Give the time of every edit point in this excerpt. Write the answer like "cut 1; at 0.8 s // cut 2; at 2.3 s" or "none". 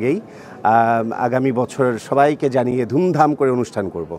none